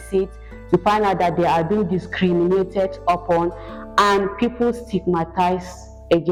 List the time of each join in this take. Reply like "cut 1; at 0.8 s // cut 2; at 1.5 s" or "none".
none